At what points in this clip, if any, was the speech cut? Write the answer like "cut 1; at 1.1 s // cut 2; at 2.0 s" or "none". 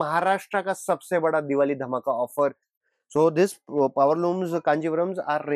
cut 1; at 2.7 s

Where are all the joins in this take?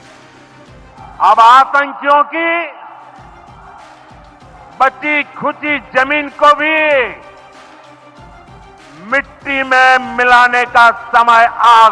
cut 1; at 0.9 s

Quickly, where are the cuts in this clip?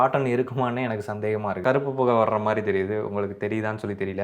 cut 1; at 1.6 s

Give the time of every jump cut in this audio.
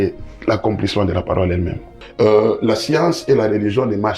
cut 1; at 2.0 s

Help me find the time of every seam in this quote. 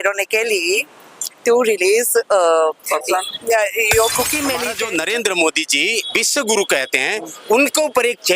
cut 1; at 4.7 s

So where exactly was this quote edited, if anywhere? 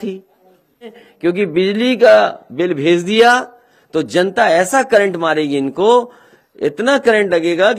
cut 1; at 1.0 s

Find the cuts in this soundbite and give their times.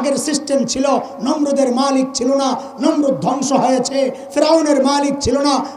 none

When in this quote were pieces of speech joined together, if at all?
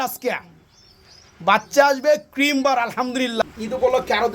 cut 1; at 3.4 s

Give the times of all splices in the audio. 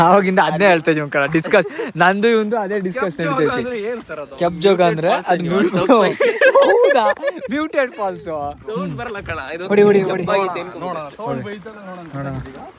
none

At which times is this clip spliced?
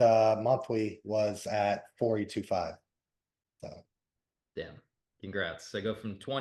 none

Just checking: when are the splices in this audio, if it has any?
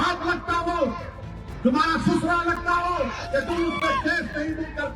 cut 1; at 3.2 s

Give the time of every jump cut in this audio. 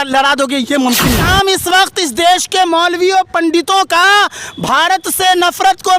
cut 1; at 1.2 s

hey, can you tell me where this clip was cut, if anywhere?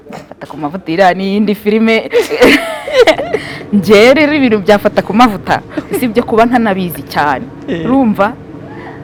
none

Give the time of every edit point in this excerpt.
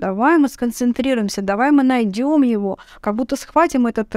none

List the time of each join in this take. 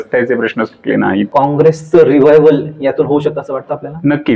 cut 1; at 1.3 s

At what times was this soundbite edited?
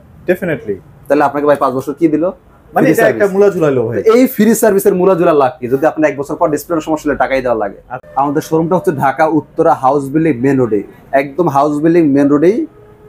cut 1; at 8.0 s

